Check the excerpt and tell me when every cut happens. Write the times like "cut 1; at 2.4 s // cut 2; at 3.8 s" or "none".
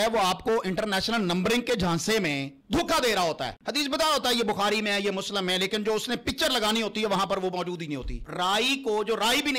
cut 1; at 2.5 s // cut 2; at 3.6 s // cut 3; at 8.2 s